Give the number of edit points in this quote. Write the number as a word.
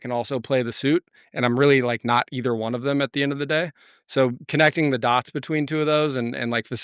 zero